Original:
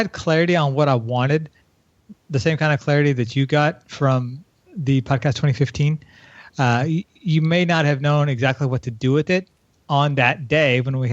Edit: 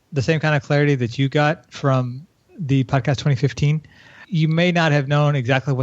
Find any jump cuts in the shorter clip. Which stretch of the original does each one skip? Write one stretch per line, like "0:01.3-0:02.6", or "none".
0:06.4-0:07.1